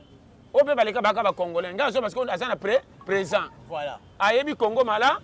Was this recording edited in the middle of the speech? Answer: no; 0 cuts

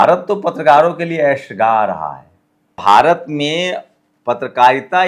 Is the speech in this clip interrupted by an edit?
yes; 1 cut; at 2.7 s

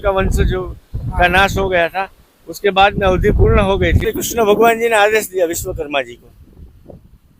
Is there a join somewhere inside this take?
yes; 1 cut; at 4.1 s

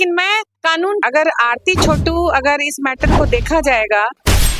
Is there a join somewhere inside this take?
yes; 1 cut; at 1.0 s

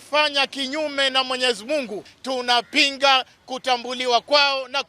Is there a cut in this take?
yes; 1 cut; at 2.1 s

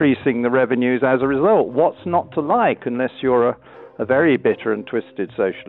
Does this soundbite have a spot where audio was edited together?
no; 0 cuts

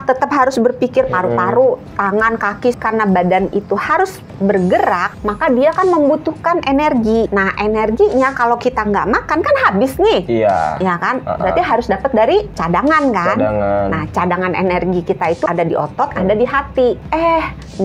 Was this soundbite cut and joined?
yes; 6 cuts; at 2.8 s, 5.1 s, 7.3 s, 12.6 s, 15.5 s, 17.0 s

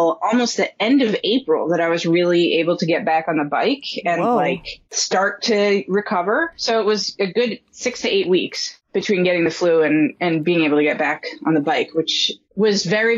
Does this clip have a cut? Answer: no; 0 cuts

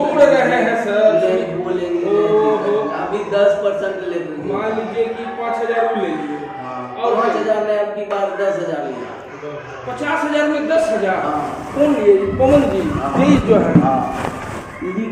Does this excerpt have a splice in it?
no; 0 cuts

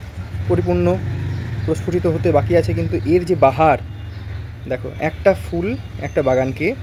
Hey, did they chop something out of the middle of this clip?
no; 0 cuts

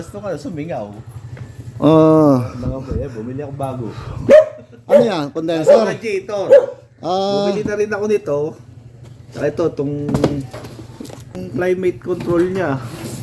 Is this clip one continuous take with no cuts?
no; 1 cut; at 11.3 s

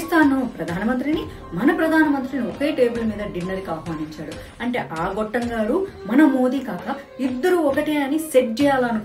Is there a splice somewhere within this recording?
no; 0 cuts

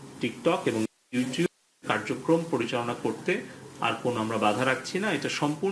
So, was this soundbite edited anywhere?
no; 0 cuts

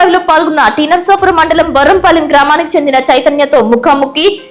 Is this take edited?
no; 0 cuts

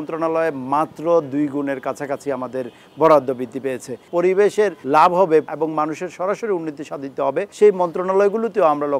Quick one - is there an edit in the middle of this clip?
yes; 4 cuts; at 4.0 s, 4.8 s, 5.5 s, 7.5 s

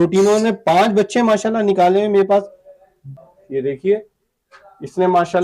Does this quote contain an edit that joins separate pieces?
yes; 1 cut; at 3.2 s

